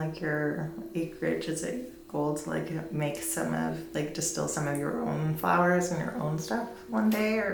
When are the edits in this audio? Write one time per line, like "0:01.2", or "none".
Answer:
none